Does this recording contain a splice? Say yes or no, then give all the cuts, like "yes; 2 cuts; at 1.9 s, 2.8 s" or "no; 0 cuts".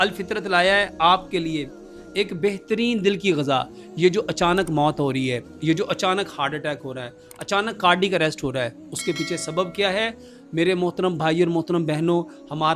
no; 0 cuts